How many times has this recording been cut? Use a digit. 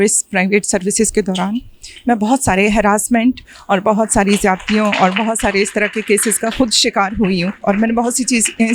0